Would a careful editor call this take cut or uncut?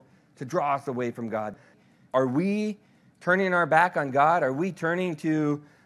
cut